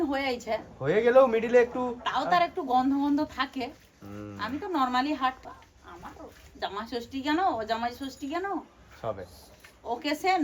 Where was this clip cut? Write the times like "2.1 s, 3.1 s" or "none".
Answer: none